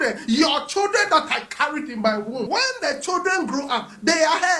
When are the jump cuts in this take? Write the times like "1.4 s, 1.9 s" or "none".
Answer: 2.4 s